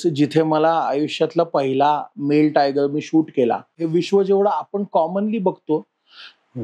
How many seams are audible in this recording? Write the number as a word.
one